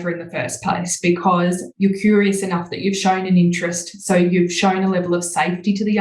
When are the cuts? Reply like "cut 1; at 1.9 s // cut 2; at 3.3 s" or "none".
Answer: cut 1; at 1.7 s